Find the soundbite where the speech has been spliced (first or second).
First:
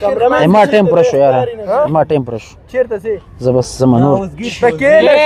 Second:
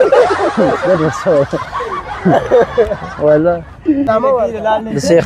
second